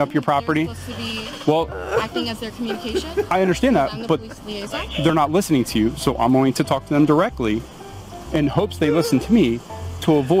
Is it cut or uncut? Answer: uncut